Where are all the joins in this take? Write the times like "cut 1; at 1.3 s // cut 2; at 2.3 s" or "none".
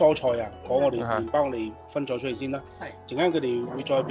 none